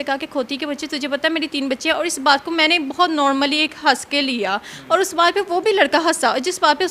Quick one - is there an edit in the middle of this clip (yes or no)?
no